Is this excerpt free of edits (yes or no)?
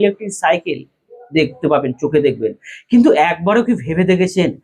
yes